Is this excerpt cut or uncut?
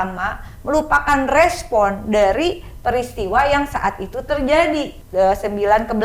cut